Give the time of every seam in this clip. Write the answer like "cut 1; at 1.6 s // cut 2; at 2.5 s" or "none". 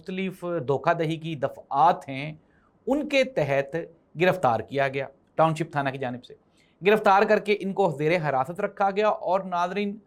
none